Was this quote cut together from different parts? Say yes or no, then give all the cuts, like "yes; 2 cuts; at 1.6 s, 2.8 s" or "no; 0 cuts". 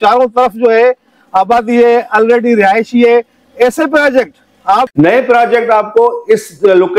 yes; 1 cut; at 4.9 s